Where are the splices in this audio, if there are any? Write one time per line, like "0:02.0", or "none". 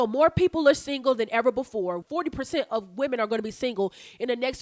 0:02.0